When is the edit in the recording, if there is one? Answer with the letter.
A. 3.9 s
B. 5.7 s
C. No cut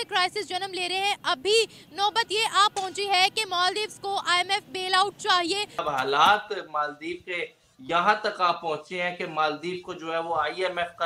B